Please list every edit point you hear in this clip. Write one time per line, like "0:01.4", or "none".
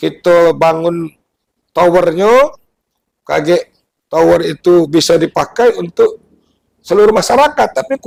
none

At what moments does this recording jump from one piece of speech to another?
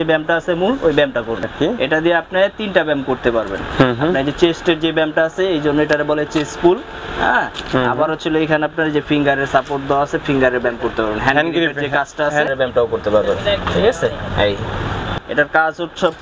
0:01.5
0:12.5
0:15.2

